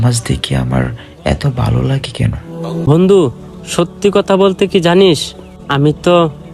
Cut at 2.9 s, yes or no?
yes